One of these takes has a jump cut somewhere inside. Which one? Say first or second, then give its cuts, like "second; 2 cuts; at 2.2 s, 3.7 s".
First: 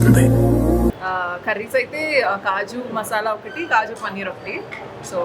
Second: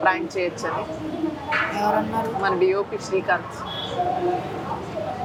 first; 1 cut; at 1.0 s